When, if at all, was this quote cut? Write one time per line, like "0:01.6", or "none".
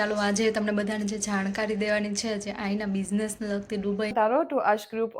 0:04.1